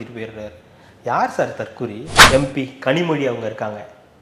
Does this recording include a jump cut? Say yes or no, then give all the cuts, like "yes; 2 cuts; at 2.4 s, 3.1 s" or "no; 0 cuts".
yes; 1 cut; at 2.1 s